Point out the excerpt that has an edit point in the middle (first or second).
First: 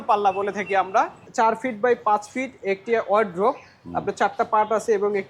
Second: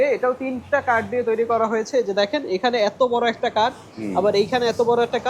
first